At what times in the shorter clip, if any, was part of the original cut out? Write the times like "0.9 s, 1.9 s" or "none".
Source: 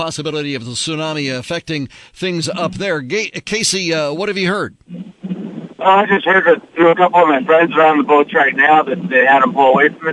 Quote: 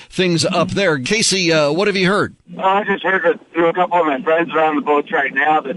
1.0 s, 2.4 s